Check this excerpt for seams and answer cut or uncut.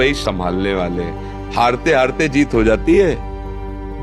uncut